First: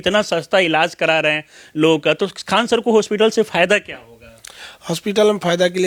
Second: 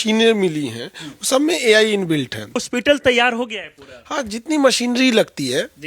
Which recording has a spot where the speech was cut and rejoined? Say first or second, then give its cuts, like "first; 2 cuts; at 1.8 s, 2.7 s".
second; 1 cut; at 2.6 s